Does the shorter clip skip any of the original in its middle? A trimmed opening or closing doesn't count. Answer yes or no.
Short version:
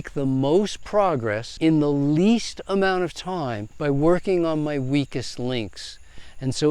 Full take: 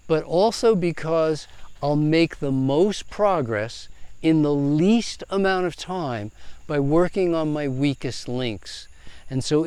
yes